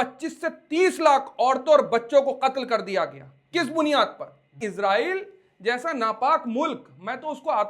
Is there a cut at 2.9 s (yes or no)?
no